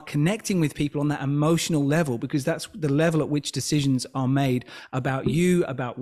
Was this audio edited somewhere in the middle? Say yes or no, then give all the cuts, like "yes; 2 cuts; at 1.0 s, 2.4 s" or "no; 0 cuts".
no; 0 cuts